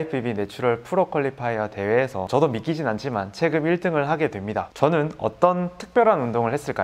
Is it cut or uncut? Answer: cut